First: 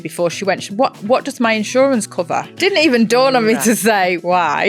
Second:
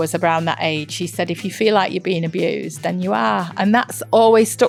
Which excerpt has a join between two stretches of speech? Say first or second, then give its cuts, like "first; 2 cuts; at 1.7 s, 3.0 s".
first; 2 cuts; at 2.5 s, 3.6 s